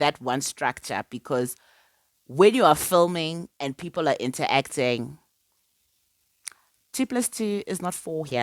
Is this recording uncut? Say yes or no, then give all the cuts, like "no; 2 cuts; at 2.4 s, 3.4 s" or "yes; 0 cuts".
yes; 0 cuts